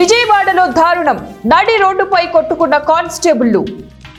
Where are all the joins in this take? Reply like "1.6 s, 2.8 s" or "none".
none